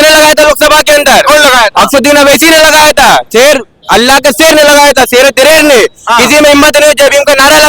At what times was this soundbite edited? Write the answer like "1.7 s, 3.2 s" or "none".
none